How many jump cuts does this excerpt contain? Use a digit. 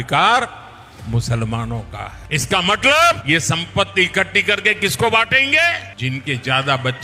3